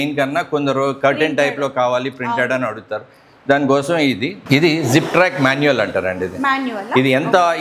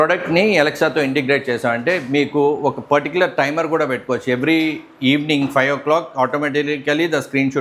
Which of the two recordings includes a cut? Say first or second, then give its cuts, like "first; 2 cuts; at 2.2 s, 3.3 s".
first; 1 cut; at 4.4 s